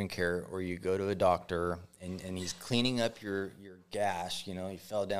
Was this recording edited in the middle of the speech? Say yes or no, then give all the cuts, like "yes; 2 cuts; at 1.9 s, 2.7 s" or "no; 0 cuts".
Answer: no; 0 cuts